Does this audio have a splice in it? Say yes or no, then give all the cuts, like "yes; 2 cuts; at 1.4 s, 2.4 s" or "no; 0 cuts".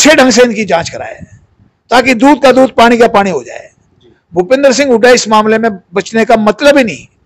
no; 0 cuts